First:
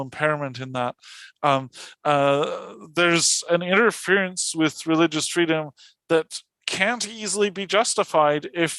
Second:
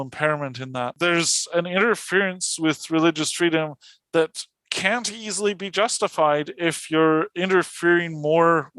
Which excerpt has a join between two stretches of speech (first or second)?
second